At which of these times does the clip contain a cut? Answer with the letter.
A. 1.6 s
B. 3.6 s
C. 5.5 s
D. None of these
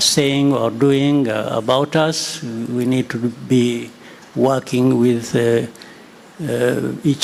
D